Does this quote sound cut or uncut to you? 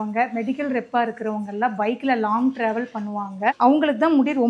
cut